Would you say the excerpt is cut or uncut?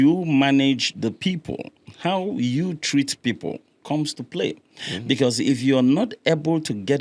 uncut